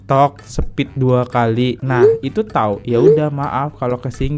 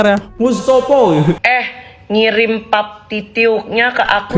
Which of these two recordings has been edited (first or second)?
second